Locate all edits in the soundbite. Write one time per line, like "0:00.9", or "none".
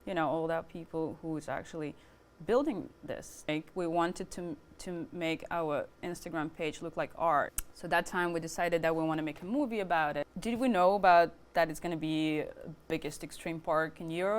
0:03.5
0:07.6
0:10.3

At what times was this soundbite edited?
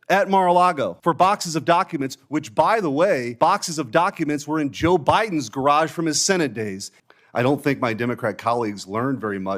0:01.0
0:03.3
0:06.9

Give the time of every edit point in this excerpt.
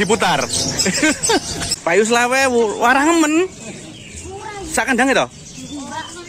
0:01.6

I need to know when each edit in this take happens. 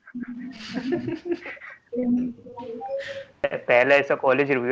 0:03.4

